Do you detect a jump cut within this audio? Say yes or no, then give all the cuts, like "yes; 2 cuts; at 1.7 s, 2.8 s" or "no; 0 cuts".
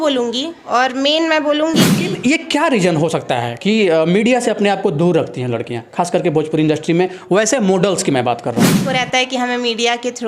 yes; 2 cuts; at 2.0 s, 8.8 s